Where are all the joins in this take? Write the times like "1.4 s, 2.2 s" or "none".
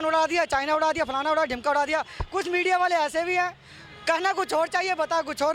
2.2 s